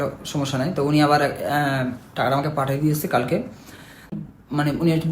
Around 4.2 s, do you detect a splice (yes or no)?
yes